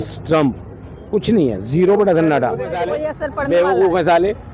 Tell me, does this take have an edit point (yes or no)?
yes